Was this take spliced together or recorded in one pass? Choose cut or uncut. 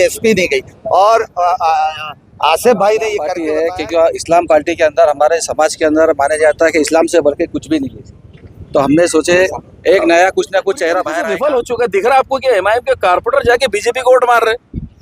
cut